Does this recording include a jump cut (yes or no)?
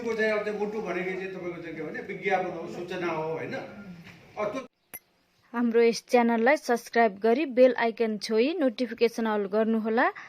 yes